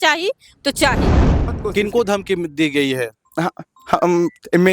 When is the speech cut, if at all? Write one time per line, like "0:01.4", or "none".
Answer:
0:01.4